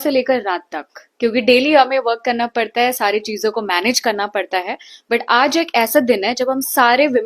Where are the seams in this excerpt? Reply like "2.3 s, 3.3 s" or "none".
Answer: none